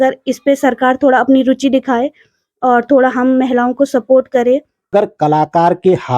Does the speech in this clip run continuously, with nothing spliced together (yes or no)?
no